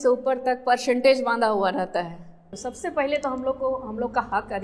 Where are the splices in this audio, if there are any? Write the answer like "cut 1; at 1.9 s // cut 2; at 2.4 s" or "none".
cut 1; at 2.5 s